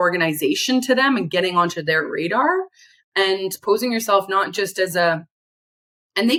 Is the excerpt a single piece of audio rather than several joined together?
yes; 0 cuts

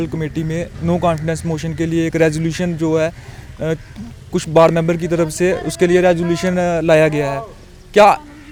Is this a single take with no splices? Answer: yes; 0 cuts

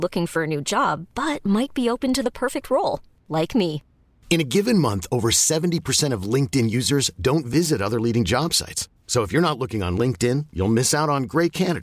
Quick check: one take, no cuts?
yes; 0 cuts

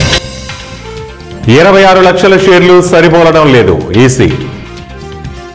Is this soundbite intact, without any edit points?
no; 1 cut; at 1.2 s

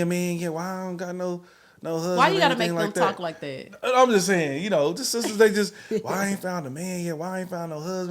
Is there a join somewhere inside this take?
no; 0 cuts

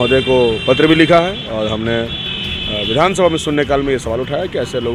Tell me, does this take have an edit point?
no; 0 cuts

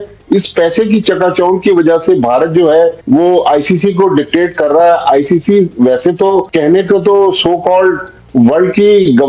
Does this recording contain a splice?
no; 0 cuts

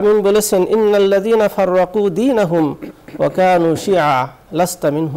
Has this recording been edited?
no; 0 cuts

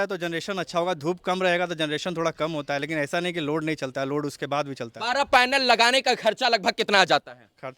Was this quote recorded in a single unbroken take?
no; 1 cut; at 4.9 s

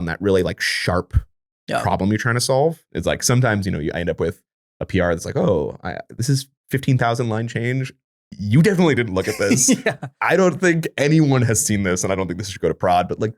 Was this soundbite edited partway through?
yes; 2 cuts; at 2.9 s, 6.5 s

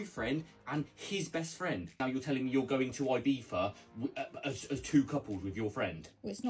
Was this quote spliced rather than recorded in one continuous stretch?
yes; 1 cut; at 2.0 s

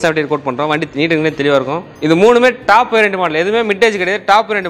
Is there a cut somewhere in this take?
yes; 1 cut; at 1.9 s

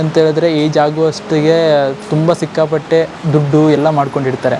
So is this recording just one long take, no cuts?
yes; 0 cuts

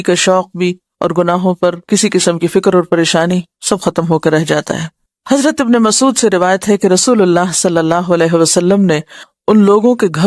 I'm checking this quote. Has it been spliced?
no; 0 cuts

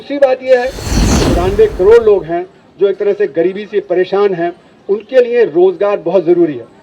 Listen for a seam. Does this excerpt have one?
yes; 1 cut; at 1.0 s

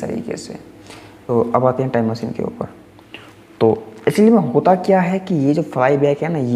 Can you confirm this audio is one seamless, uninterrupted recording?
no; 1 cut; at 1.3 s

